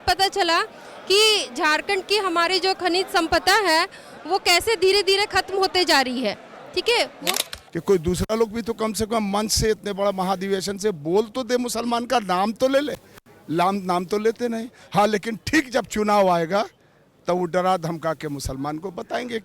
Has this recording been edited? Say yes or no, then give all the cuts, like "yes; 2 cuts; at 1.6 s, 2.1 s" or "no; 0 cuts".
yes; 1 cut; at 7.3 s